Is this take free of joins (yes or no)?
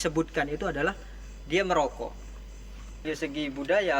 no